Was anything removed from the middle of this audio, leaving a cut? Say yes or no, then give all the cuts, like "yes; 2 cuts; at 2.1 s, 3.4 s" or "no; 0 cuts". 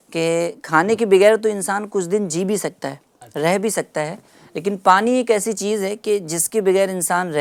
no; 0 cuts